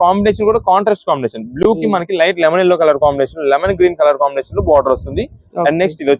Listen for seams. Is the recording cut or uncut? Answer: uncut